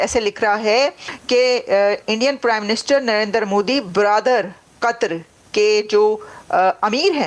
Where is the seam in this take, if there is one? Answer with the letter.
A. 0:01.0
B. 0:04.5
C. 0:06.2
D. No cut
A